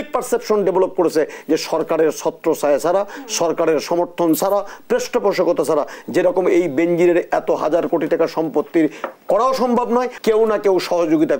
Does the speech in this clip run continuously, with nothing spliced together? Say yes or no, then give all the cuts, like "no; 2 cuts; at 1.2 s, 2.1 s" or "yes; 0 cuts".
no; 1 cut; at 10.1 s